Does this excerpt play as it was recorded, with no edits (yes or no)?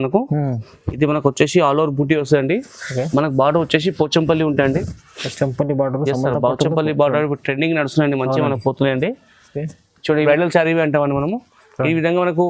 no